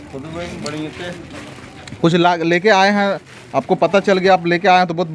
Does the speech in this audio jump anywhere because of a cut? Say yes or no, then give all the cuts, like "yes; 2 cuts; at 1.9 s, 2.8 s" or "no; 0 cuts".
no; 0 cuts